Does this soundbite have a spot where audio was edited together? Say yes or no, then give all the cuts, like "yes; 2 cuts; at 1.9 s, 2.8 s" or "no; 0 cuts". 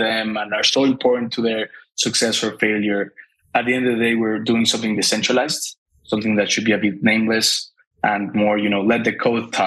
no; 0 cuts